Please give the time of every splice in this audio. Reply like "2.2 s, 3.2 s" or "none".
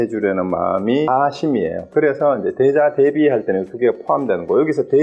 1.1 s